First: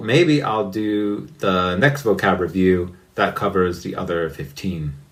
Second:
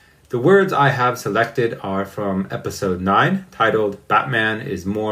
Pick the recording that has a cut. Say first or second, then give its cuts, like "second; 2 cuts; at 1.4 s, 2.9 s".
second; 1 cut; at 3.5 s